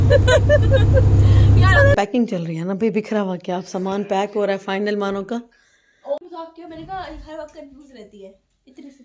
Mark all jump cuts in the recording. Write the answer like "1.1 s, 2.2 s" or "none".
1.9 s, 6.2 s

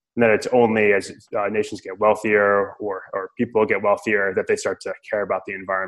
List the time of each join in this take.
none

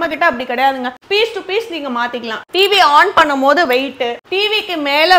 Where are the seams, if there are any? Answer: 1.0 s, 2.4 s, 4.2 s

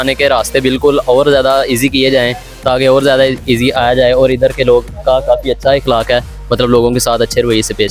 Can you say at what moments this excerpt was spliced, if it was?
none

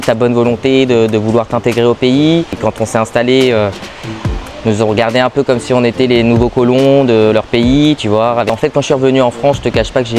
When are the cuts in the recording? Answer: 2.6 s, 8.5 s

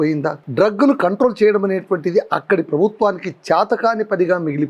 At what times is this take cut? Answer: none

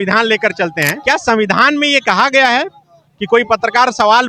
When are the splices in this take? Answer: 0.9 s

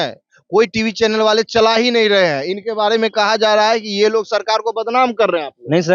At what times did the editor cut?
none

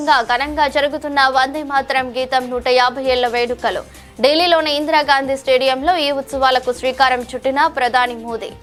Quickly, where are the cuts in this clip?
none

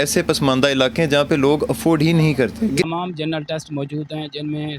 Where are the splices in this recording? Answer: 2.9 s

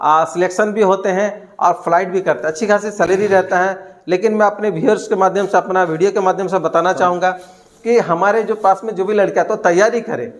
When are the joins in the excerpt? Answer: none

